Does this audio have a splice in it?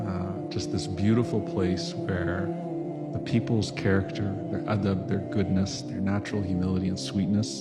no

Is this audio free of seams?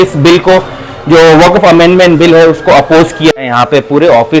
no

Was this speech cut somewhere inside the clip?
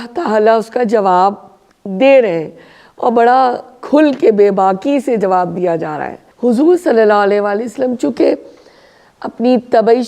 yes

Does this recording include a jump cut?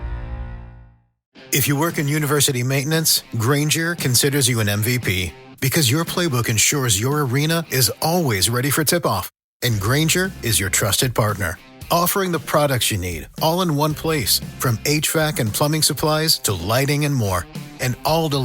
yes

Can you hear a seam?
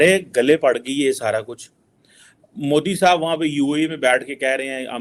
no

